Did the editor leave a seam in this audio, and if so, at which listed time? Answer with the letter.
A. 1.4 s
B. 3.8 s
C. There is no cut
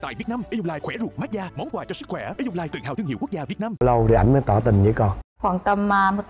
B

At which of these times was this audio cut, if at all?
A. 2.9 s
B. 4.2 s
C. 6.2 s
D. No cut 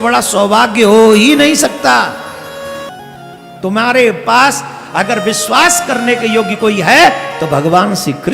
A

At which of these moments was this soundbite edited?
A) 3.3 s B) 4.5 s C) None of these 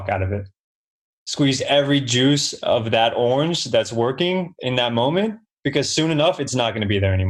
C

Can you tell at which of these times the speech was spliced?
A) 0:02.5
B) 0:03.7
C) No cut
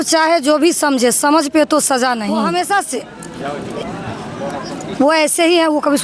A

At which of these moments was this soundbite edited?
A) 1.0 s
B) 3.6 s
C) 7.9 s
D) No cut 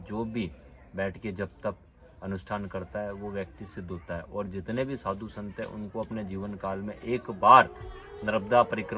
D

